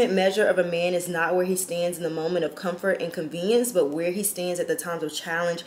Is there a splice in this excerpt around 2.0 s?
no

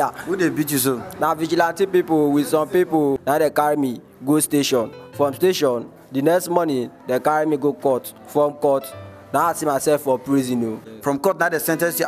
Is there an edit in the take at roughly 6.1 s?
no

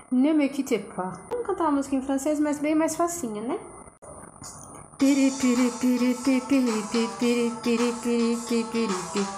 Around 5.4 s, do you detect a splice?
no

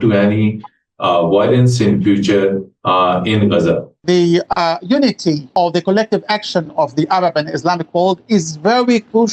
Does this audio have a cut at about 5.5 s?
yes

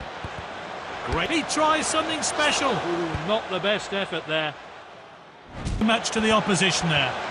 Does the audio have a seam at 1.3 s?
no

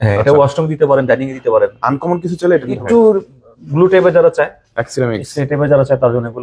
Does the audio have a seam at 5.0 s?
no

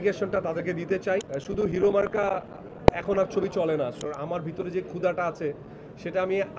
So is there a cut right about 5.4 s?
no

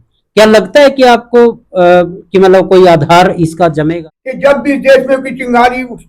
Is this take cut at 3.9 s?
yes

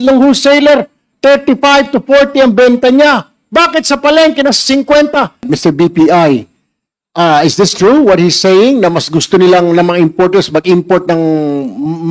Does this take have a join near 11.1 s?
no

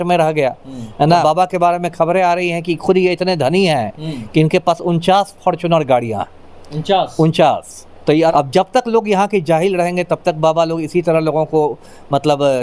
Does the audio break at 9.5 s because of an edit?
no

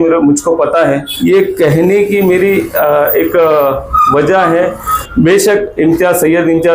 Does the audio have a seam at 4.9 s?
yes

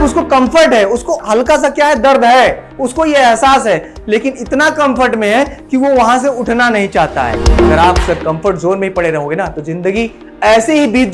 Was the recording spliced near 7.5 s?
yes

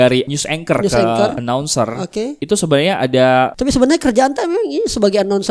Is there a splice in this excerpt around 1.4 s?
yes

